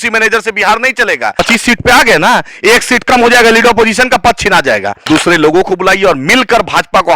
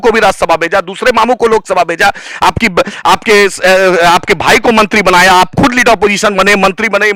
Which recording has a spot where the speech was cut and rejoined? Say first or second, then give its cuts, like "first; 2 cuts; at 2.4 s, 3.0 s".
first; 2 cuts; at 1.3 s, 4.9 s